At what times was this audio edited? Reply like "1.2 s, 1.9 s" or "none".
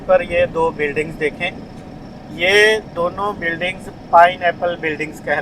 none